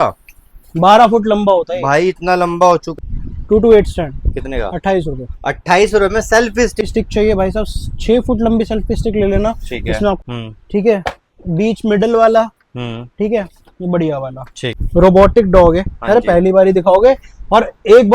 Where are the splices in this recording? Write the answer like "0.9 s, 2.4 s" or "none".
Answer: 2.9 s, 6.9 s, 10.3 s, 14.8 s